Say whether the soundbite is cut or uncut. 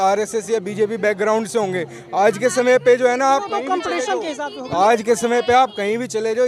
uncut